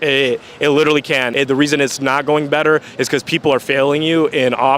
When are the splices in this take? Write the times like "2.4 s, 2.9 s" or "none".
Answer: 1.3 s